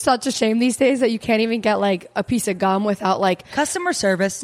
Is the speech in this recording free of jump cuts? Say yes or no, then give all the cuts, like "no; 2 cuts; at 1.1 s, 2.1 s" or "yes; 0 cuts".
no; 1 cut; at 3.5 s